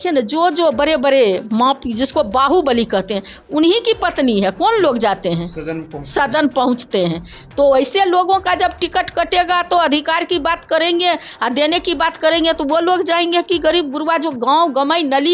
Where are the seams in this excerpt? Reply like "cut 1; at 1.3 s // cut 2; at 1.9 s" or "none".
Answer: none